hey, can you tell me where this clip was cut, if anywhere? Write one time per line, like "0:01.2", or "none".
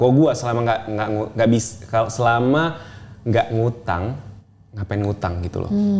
none